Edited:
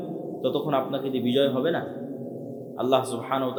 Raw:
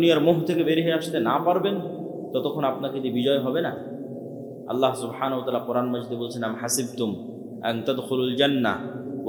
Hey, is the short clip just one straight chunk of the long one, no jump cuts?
yes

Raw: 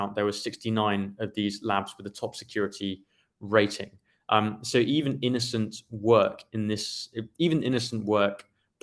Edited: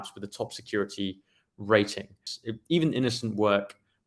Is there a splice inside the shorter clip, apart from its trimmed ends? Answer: yes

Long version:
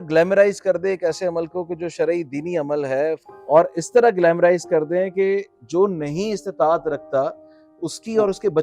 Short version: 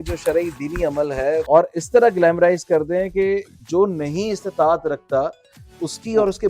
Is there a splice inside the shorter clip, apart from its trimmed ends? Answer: yes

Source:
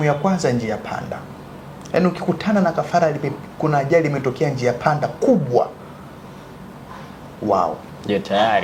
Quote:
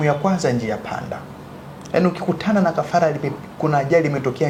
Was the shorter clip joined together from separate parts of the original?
no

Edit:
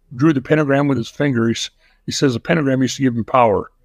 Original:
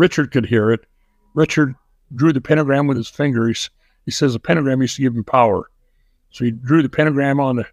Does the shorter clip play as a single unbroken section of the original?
yes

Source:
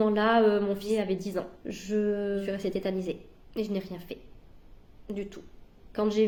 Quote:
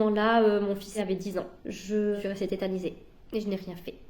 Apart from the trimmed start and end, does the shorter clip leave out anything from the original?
yes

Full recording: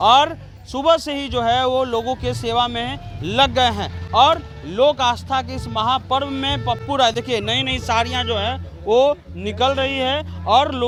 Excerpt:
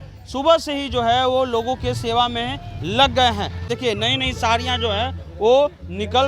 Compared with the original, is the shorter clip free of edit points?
no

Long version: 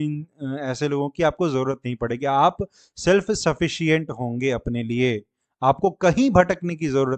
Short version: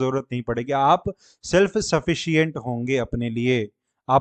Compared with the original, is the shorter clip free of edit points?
yes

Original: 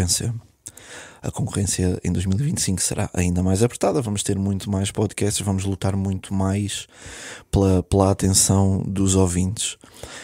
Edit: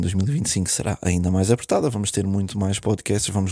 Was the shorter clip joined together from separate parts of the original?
no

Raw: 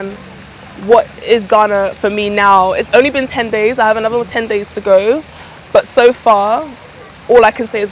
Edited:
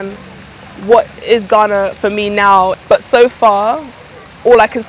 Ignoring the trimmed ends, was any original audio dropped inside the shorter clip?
yes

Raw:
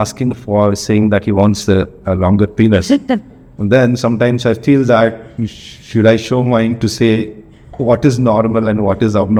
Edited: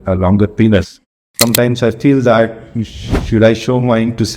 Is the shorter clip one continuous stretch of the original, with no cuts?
no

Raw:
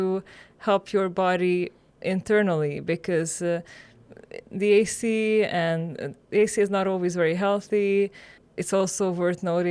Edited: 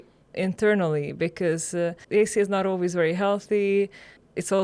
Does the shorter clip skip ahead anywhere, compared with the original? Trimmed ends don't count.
yes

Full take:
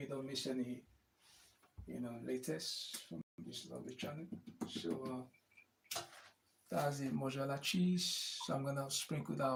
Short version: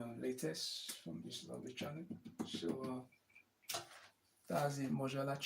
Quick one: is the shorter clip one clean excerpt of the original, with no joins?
no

